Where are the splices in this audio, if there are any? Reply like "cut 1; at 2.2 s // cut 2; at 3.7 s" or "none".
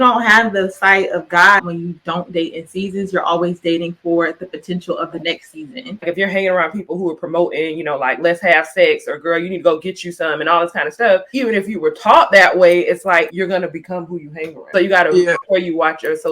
cut 1; at 1.6 s // cut 2; at 6.0 s

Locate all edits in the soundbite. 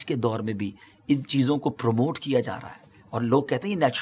none

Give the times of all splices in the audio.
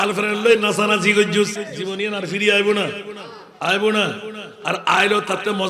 cut 1; at 1.7 s

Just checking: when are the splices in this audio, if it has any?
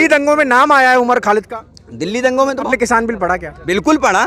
cut 1; at 2.7 s

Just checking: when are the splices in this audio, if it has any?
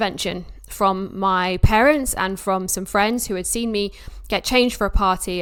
none

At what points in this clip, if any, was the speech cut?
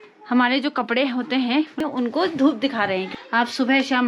cut 1; at 1.8 s // cut 2; at 3.2 s

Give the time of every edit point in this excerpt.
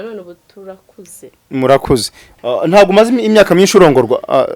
cut 1; at 2.3 s

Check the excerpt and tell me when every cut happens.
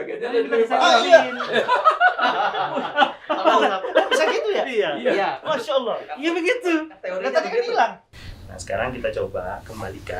cut 1; at 8.0 s

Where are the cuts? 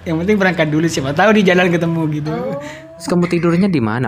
cut 1; at 2.4 s

